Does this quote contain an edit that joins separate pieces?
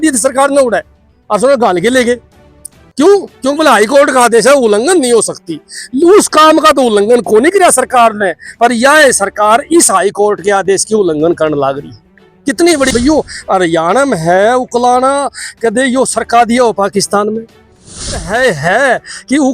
yes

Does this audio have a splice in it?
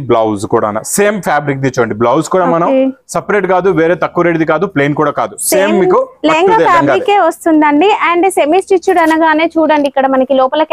no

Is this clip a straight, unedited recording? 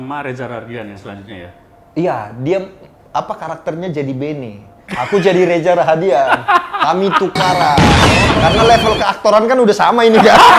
yes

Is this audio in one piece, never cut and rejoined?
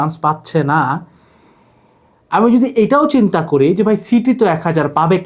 yes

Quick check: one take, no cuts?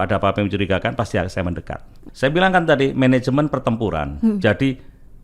no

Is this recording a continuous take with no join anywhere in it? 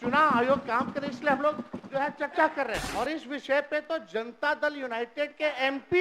no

